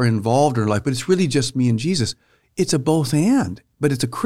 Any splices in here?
no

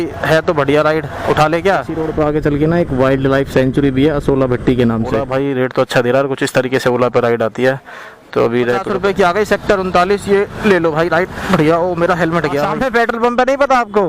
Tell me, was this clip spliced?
yes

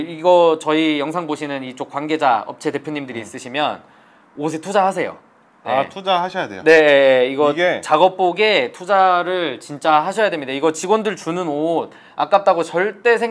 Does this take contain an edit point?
no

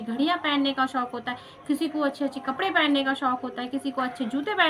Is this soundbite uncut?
yes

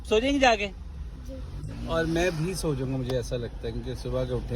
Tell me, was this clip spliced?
no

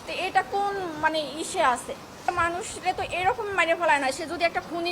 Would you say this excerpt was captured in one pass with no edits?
no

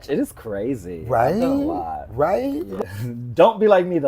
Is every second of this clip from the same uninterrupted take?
no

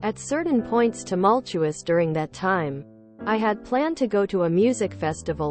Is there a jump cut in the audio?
no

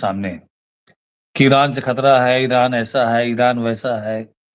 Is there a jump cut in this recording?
no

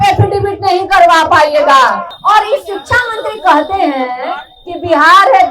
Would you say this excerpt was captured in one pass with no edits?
no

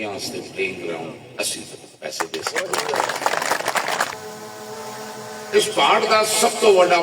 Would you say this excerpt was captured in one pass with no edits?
no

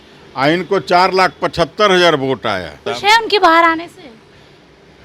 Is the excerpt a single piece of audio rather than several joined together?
no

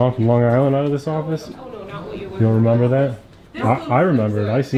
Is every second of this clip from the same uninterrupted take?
yes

